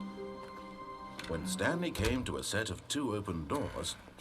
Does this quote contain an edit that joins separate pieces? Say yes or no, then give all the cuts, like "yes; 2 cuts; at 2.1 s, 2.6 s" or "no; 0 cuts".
yes; 1 cut; at 1.4 s